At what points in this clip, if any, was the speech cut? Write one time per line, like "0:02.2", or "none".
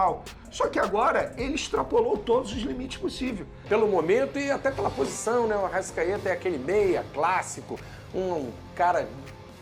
0:03.5